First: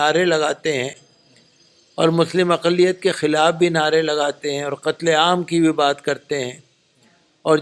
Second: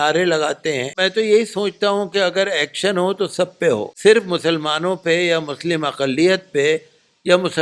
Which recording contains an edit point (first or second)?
second